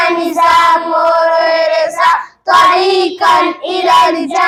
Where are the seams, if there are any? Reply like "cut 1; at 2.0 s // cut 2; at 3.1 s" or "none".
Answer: none